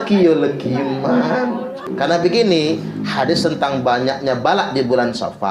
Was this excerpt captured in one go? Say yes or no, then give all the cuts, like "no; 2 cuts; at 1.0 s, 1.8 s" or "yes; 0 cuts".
no; 1 cut; at 1.9 s